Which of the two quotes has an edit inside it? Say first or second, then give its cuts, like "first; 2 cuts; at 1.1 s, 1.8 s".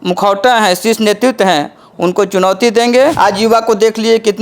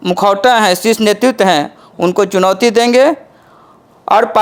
first; 1 cut; at 3.2 s